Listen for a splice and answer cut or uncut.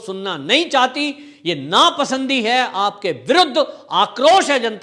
uncut